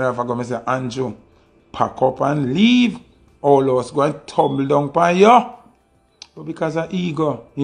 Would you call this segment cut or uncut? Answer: uncut